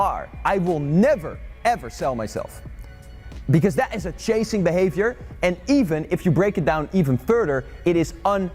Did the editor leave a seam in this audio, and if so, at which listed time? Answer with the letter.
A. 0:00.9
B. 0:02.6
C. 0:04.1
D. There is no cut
D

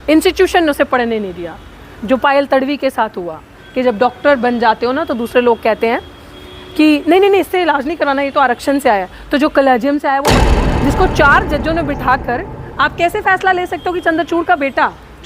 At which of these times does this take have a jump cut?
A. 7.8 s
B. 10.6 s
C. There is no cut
B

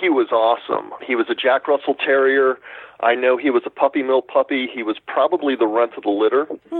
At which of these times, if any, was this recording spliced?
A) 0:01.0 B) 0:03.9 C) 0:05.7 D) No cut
A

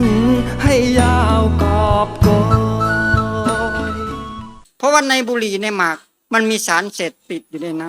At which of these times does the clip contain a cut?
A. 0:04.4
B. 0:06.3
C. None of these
A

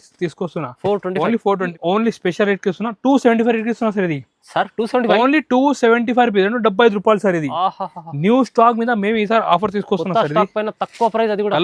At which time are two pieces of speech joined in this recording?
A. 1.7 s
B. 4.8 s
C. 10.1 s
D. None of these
A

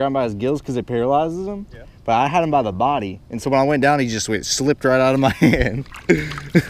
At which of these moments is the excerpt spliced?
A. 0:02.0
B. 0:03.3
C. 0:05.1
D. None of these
D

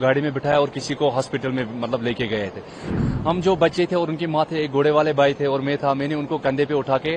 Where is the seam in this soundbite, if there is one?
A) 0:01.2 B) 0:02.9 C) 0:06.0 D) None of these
B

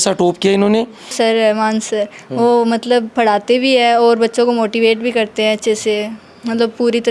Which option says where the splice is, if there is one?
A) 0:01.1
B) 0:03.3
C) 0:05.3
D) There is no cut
A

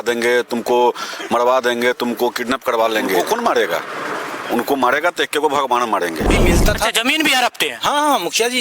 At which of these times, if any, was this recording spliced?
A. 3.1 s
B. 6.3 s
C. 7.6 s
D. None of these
B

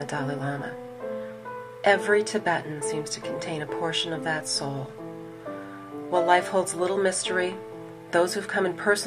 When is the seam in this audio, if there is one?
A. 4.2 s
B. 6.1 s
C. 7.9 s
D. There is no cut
A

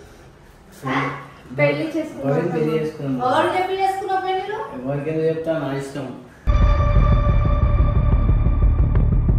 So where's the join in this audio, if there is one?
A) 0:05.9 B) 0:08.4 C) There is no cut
C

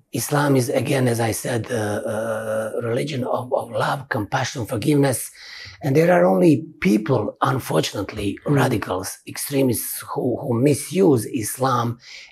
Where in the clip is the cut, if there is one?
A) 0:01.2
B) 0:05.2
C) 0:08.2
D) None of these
D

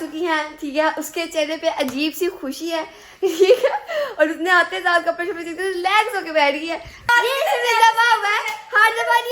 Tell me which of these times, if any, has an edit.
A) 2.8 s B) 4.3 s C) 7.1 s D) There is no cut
C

